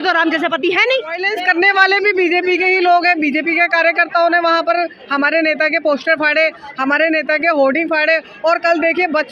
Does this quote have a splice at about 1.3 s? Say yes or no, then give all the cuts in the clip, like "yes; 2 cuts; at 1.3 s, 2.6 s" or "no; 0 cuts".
yes; 1 cut; at 1.3 s